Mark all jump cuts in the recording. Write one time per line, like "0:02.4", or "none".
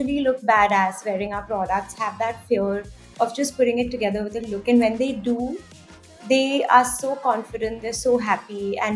none